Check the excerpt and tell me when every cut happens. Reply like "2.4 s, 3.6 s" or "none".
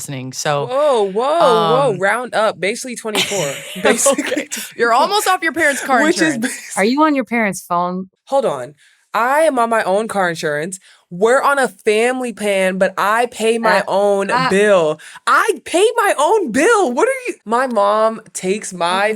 6.7 s, 8.0 s, 17.3 s